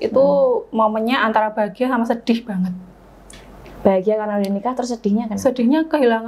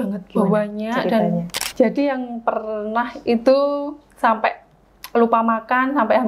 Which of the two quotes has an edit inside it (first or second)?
second